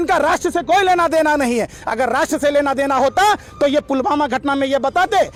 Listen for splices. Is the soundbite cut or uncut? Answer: uncut